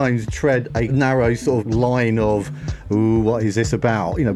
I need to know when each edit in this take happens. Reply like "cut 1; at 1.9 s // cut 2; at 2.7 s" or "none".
cut 1; at 0.9 s // cut 2; at 1.6 s